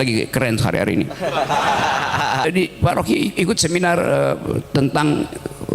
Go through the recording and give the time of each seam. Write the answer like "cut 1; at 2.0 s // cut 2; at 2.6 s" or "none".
cut 1; at 2.4 s